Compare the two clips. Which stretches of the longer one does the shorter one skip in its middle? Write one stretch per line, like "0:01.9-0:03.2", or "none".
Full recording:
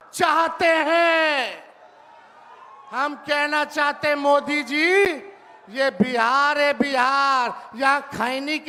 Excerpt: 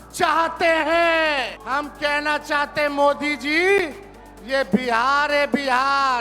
0:01.6-0:02.8